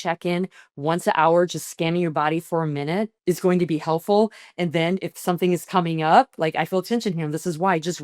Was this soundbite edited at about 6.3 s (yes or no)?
no